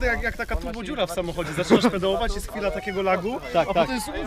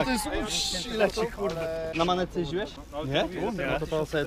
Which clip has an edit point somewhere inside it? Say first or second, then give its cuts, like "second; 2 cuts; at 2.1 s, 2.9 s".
second; 2 cuts; at 1.9 s, 2.8 s